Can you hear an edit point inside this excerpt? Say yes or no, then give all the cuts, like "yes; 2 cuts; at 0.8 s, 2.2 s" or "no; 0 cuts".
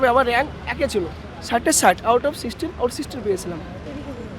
no; 0 cuts